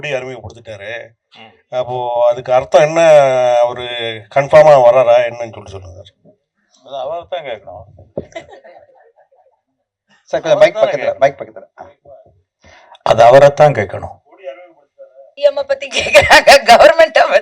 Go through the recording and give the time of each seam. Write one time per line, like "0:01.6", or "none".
0:15.3